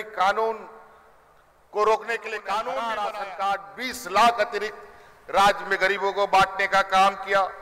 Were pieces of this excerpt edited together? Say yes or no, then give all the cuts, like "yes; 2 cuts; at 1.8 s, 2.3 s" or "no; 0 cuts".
yes; 1 cut; at 2.8 s